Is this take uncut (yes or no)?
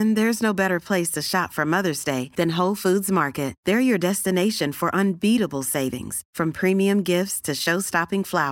yes